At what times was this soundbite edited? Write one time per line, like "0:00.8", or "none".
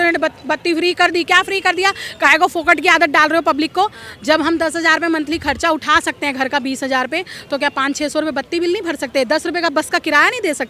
none